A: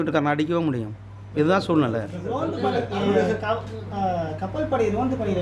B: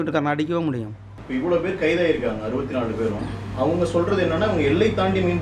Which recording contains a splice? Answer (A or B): B